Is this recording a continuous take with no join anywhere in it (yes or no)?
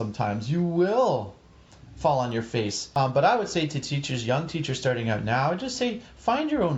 no